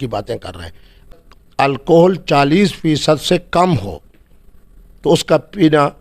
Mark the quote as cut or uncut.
cut